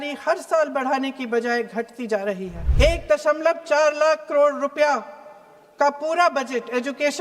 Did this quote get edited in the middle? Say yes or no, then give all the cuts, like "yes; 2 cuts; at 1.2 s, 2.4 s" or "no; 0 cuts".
yes; 1 cut; at 2.6 s